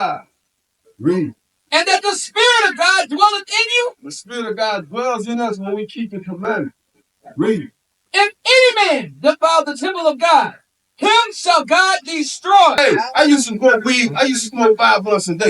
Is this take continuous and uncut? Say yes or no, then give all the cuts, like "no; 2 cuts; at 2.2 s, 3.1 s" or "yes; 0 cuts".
no; 1 cut; at 12.8 s